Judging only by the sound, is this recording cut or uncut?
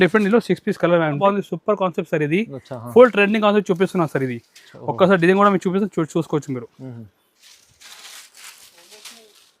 cut